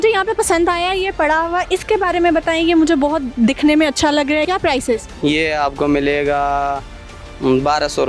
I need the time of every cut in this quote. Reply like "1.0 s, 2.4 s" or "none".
none